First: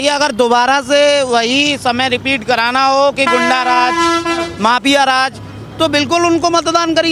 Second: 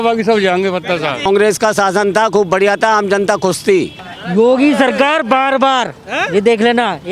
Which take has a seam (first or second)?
second